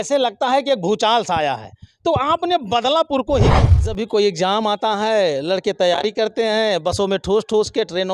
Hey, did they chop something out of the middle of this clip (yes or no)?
yes